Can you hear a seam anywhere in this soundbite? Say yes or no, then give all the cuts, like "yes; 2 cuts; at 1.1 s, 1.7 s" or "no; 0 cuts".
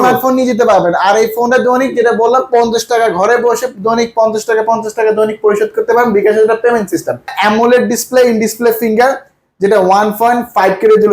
yes; 1 cut; at 7.4 s